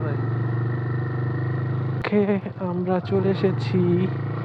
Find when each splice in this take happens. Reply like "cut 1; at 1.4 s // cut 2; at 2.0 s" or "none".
cut 1; at 2.0 s